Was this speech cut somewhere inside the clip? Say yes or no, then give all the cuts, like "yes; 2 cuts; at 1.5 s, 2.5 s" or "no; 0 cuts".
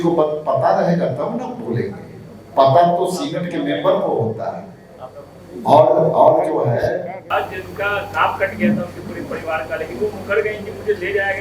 yes; 1 cut; at 7.2 s